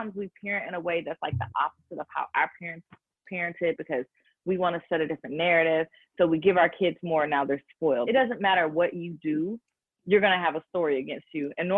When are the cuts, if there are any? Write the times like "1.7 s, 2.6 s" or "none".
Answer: 8.1 s